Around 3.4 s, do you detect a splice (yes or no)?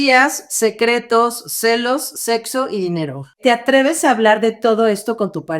yes